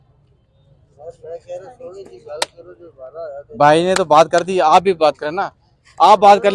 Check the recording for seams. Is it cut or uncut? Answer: uncut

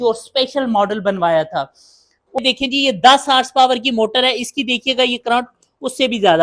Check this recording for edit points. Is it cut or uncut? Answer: cut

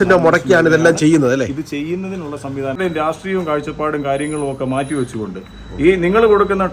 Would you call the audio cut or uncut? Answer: cut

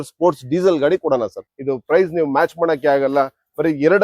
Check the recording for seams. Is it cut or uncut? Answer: cut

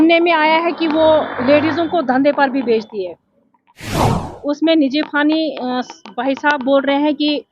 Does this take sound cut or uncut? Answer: cut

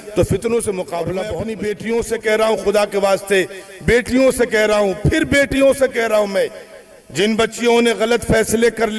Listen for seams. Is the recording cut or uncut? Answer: cut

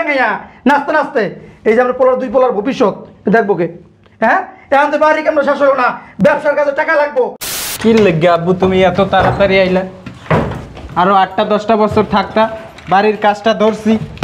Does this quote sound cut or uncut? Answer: cut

